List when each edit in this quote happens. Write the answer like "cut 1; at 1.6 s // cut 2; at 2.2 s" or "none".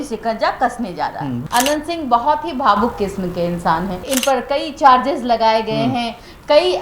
cut 1; at 1.4 s // cut 2; at 4.0 s